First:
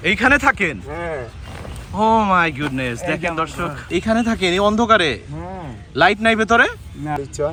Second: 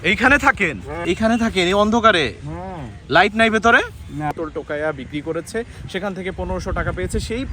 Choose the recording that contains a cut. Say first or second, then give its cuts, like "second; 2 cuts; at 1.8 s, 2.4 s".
second; 2 cuts; at 0.9 s, 4.3 s